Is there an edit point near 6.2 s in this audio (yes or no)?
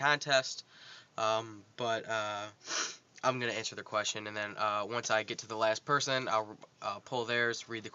yes